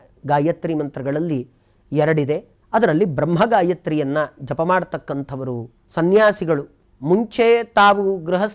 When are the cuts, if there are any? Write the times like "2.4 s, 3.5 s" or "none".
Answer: 2.5 s

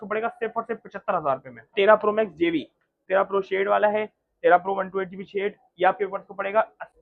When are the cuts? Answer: 1.7 s, 3.0 s

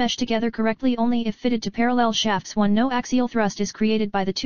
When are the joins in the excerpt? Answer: 2.6 s

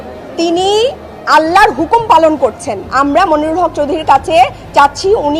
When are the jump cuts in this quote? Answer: 2.8 s

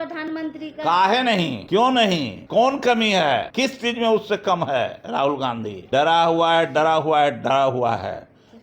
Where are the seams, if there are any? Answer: 1.6 s, 2.4 s, 3.5 s, 5.8 s

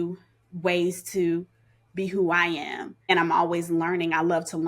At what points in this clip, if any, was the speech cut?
2.9 s

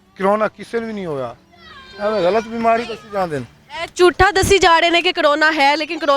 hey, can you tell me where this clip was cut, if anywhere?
none

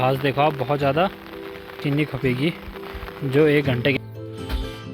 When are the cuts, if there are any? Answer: 1.8 s, 4.0 s

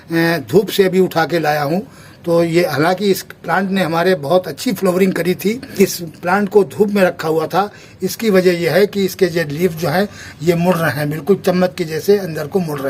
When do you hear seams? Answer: 5.7 s

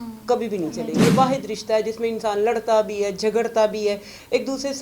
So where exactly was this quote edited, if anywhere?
1.0 s

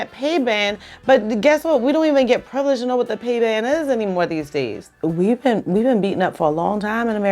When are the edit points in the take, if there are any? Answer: 4.9 s

